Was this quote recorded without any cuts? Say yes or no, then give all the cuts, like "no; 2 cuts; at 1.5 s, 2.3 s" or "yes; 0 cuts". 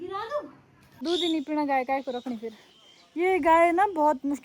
no; 1 cut; at 1.0 s